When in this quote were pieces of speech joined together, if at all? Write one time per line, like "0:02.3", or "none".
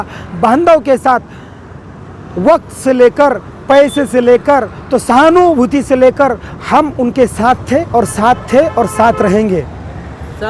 none